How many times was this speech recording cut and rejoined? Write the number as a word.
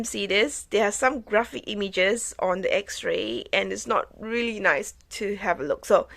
zero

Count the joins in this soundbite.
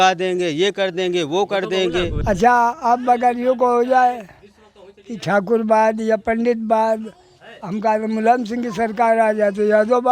one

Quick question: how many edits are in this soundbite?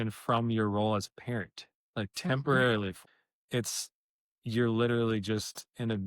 one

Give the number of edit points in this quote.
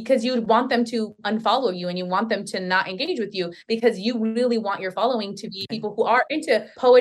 one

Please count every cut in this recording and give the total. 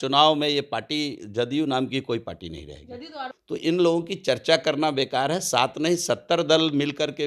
one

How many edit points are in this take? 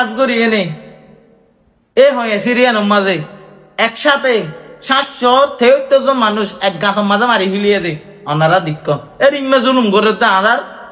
zero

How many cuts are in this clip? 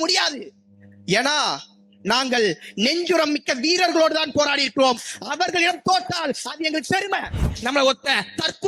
one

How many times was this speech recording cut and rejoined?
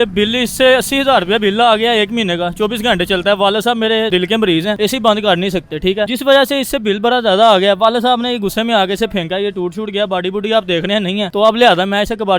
three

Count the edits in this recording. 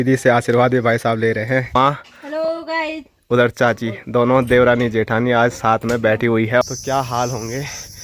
two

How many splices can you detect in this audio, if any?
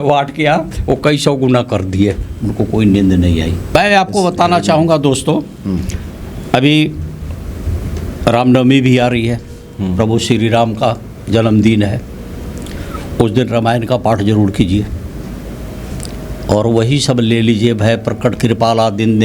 one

